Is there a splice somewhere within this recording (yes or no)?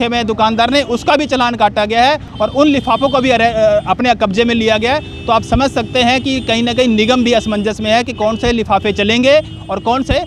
no